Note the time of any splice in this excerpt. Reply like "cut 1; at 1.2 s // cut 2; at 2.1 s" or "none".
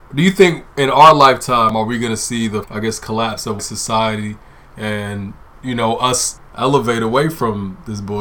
cut 1; at 2.7 s // cut 2; at 3.6 s // cut 3; at 6.3 s